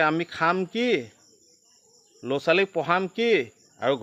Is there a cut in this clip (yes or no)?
no